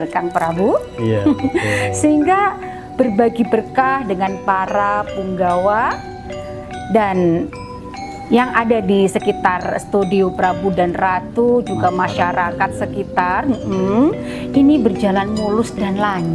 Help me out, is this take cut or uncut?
uncut